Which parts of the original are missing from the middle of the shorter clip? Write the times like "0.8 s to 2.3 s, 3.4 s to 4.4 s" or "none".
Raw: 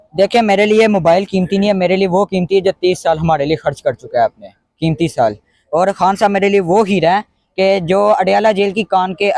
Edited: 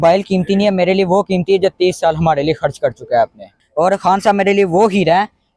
4.6 s to 5.5 s